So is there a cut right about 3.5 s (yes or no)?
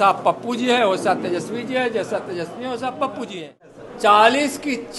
yes